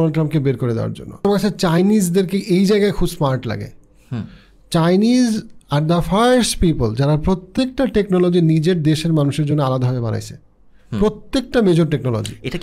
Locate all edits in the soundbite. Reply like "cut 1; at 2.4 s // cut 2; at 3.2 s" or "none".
cut 1; at 1.1 s